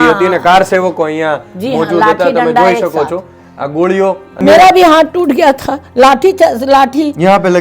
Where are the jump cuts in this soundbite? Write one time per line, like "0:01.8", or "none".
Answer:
0:04.4